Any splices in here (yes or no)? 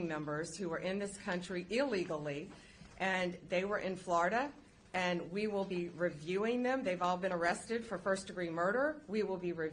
no